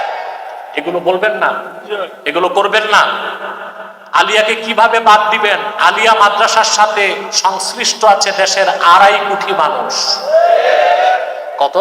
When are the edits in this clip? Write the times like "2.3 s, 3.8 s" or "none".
none